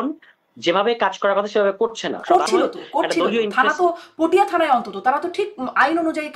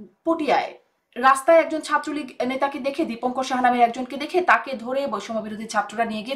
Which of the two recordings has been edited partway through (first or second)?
first